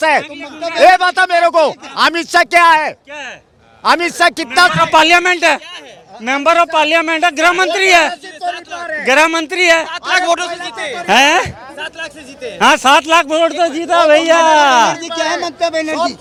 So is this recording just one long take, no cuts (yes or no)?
yes